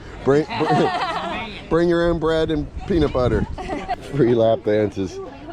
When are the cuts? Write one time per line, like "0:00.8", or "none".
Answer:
0:04.0